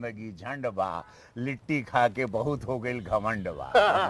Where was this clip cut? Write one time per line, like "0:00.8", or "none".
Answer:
none